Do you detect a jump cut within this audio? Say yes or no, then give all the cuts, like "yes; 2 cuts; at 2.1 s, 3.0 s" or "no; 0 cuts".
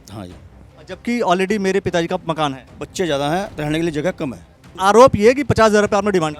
yes; 1 cut; at 4.7 s